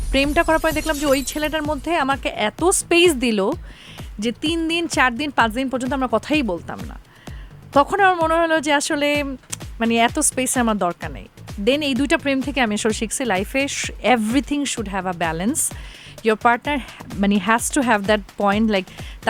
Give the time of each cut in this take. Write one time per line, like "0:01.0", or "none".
none